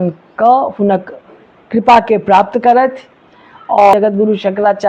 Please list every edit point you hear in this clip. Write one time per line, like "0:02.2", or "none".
0:03.9

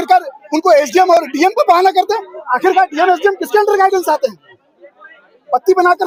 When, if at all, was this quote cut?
none

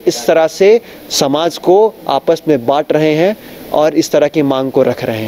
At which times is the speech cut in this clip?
none

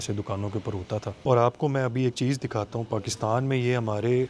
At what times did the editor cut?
0:01.1

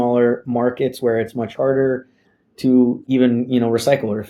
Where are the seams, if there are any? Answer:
0:03.0

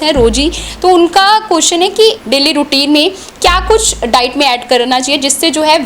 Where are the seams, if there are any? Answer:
0:02.2

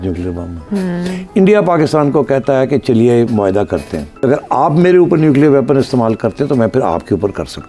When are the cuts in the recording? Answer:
0:04.1

